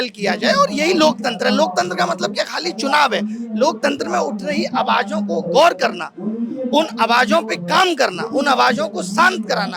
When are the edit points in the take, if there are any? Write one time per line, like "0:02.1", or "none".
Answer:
none

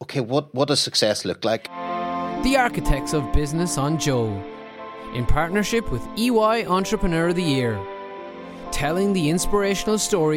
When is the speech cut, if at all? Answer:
0:01.7

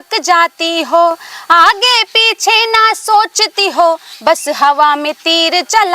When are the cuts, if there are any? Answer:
none

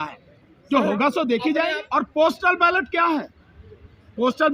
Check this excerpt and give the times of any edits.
0:01.8

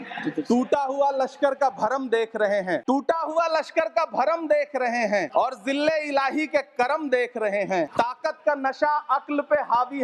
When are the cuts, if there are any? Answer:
0:02.8
0:05.3
0:07.9

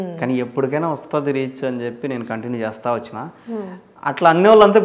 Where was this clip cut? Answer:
none

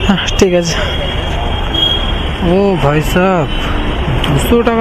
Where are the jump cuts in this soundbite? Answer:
none

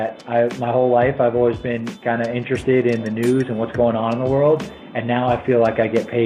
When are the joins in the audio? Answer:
none

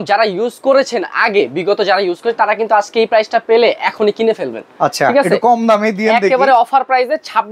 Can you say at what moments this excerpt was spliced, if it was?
none

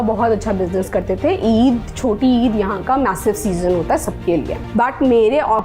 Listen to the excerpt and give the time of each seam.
0:04.6

